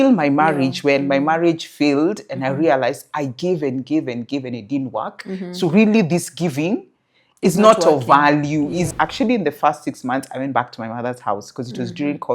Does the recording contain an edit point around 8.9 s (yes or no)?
yes